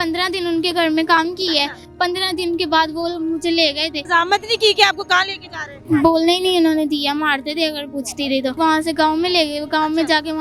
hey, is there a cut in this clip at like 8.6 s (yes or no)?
yes